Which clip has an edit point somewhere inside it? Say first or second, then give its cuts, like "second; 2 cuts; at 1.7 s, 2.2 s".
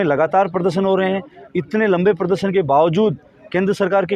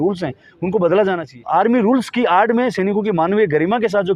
second; 1 cut; at 1.3 s